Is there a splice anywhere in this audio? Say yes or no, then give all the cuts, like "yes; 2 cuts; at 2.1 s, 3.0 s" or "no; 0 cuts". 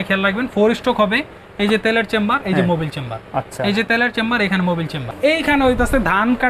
yes; 1 cut; at 5.0 s